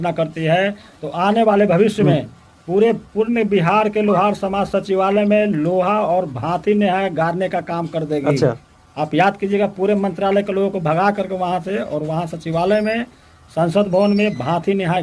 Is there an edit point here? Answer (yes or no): no